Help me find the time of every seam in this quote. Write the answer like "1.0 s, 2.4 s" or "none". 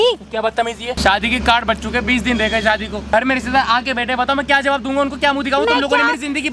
1.0 s, 3.0 s